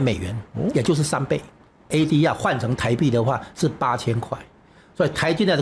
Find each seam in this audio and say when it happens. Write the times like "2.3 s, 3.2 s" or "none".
1.9 s

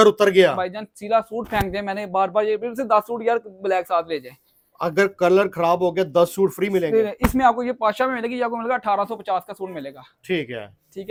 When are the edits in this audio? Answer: none

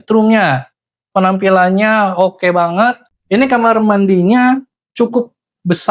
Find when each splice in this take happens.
3.1 s

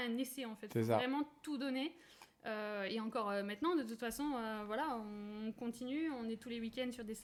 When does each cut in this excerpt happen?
none

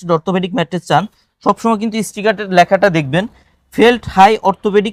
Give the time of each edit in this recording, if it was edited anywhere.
none

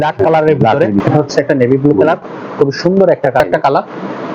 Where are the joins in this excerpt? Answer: 1.0 s, 3.4 s

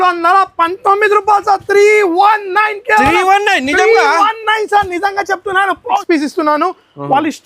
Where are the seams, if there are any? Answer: 6.0 s

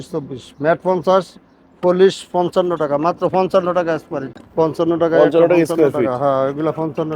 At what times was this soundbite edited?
4.2 s

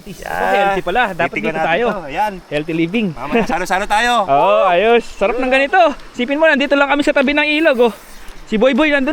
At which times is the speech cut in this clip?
none

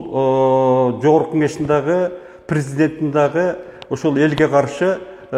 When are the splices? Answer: none

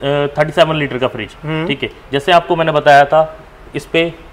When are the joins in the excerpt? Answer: none

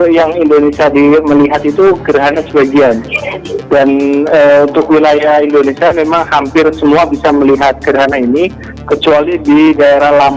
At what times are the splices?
none

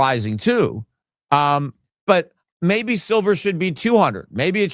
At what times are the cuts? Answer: none

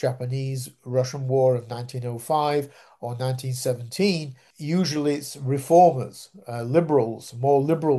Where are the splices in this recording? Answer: 4.5 s

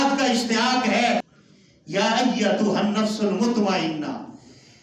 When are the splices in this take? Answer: 1.2 s

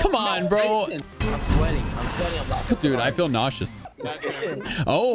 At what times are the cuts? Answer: 1.0 s, 3.7 s

